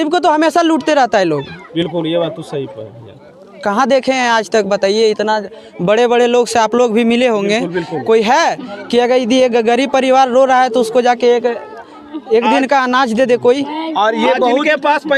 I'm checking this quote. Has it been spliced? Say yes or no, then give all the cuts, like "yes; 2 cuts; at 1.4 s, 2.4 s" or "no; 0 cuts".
no; 0 cuts